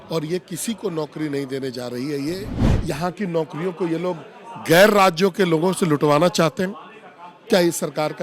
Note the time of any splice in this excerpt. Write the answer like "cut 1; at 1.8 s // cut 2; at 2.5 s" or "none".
cut 1; at 2.6 s